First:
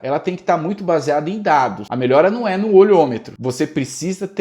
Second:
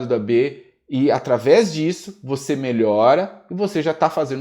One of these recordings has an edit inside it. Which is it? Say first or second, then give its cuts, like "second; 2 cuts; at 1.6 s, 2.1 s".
first; 2 cuts; at 1.8 s, 3.3 s